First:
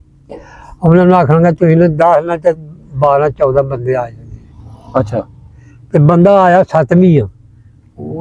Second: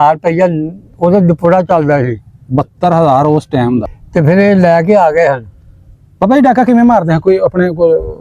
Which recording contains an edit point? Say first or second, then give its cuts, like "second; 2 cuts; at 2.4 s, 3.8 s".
second; 1 cut; at 4.0 s